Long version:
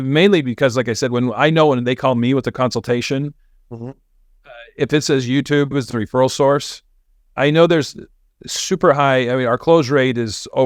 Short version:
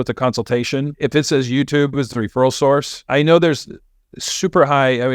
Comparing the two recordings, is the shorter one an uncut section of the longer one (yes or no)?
no